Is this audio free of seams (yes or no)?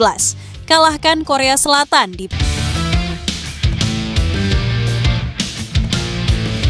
no